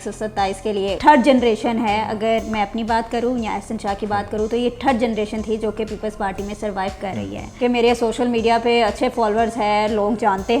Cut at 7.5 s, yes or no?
yes